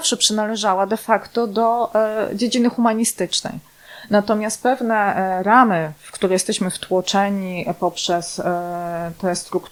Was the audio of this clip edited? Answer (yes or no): no